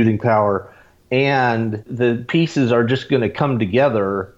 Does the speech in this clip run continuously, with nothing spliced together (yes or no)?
no